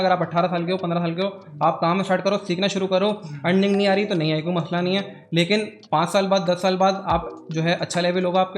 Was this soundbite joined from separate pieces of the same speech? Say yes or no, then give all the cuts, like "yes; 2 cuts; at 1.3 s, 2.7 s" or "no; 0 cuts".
no; 0 cuts